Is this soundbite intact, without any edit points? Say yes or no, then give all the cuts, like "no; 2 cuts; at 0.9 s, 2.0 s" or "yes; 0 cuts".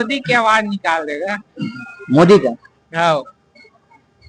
yes; 0 cuts